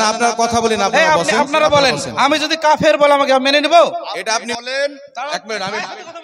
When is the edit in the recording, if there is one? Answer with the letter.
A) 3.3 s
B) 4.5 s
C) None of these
B